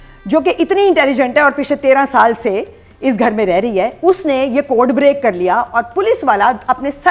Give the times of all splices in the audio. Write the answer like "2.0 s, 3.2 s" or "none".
none